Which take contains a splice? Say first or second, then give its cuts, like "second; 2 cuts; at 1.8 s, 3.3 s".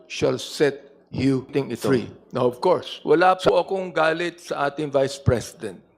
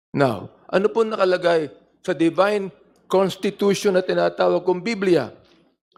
first; 1 cut; at 2.9 s